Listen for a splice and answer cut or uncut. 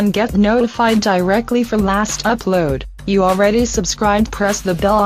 uncut